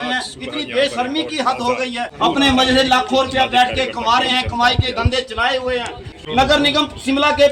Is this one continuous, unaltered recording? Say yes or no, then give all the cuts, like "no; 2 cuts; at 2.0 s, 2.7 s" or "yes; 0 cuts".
no; 2 cuts; at 2.1 s, 6.2 s